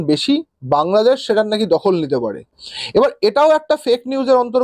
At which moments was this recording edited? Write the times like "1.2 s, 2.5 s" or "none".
none